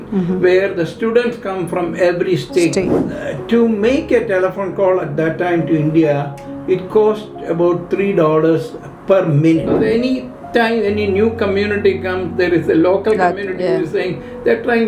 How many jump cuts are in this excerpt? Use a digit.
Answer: 2